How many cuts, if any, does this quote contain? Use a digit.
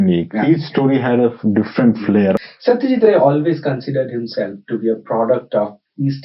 1